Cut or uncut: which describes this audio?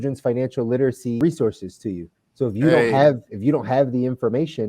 uncut